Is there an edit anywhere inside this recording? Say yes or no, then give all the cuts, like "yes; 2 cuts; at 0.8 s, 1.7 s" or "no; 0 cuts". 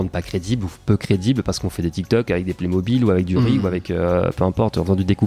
no; 0 cuts